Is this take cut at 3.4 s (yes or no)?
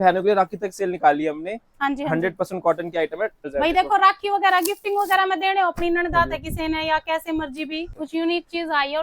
yes